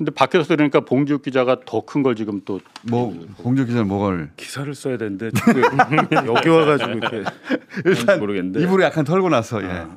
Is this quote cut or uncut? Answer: uncut